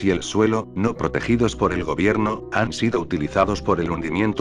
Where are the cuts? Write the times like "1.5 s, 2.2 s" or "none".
none